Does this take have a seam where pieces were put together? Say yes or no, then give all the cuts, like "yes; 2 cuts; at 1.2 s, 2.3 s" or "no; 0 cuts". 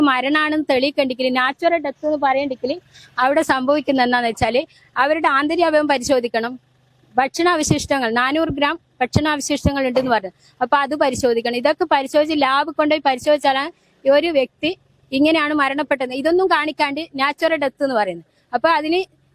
no; 0 cuts